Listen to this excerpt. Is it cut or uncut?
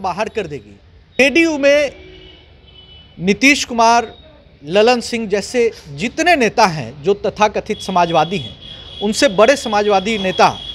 cut